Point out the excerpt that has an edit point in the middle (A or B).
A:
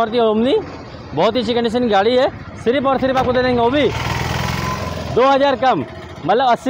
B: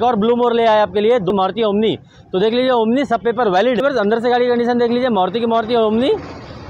B